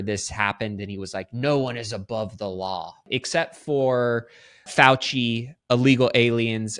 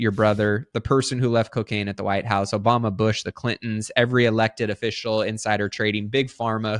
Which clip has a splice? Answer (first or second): first